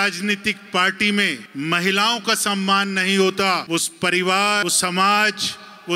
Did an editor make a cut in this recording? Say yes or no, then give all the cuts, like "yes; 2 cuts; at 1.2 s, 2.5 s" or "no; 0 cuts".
yes; 3 cuts; at 1.4 s, 3.6 s, 4.6 s